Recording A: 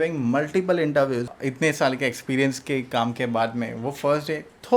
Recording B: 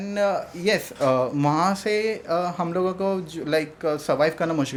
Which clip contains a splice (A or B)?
A